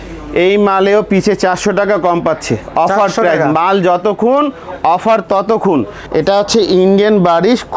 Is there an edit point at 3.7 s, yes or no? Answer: no